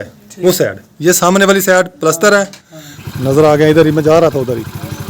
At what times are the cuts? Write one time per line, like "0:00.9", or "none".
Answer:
0:03.0